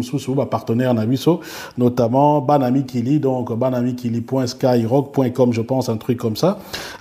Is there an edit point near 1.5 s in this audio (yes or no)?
no